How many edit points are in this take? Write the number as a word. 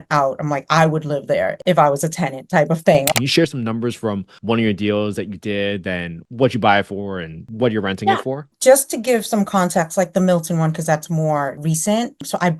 five